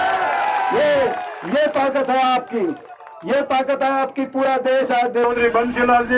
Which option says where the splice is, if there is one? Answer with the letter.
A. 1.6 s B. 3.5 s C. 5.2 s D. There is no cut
C